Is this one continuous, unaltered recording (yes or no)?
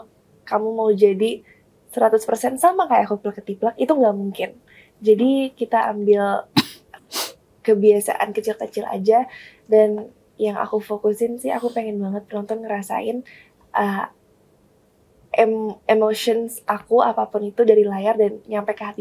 yes